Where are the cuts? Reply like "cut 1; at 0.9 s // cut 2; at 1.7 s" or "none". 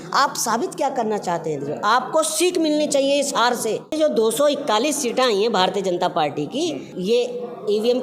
cut 1; at 3.9 s // cut 2; at 6.9 s